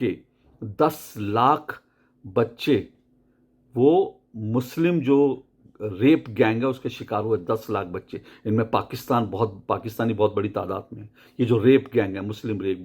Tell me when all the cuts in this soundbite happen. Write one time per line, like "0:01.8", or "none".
none